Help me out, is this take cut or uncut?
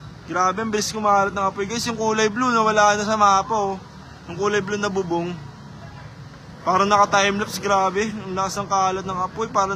uncut